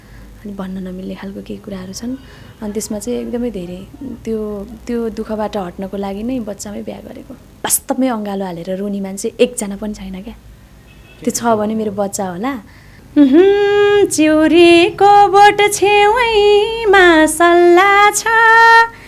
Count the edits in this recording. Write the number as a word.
two